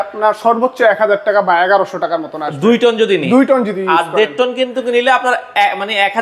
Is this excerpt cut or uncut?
uncut